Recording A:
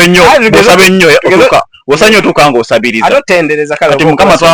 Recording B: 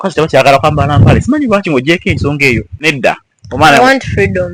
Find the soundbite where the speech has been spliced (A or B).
B